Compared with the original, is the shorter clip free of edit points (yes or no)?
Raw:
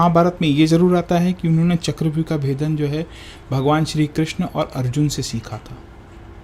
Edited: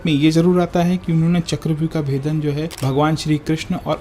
no